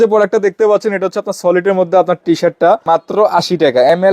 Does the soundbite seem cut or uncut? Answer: cut